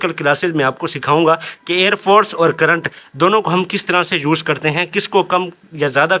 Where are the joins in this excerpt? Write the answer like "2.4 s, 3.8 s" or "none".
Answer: none